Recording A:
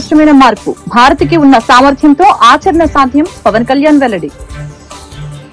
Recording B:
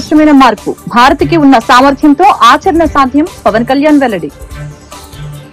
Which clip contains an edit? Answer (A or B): A